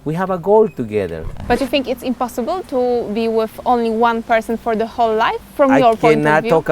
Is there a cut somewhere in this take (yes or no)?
yes